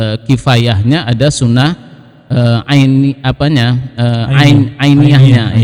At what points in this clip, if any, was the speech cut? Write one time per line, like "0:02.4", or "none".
none